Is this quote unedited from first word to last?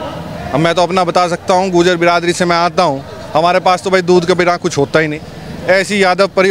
yes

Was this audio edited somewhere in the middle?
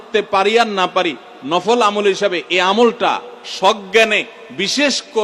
no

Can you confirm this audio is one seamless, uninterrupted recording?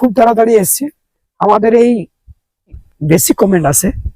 no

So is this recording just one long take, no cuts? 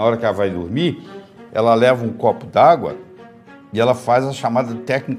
yes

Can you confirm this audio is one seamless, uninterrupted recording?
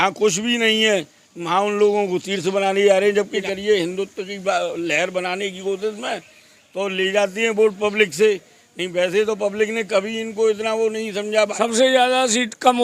no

